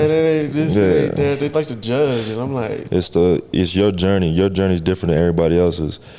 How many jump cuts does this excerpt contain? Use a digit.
1